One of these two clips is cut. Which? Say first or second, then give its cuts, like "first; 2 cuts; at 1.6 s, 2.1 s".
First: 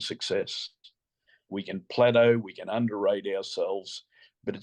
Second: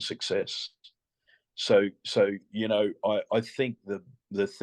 first; 1 cut; at 1.5 s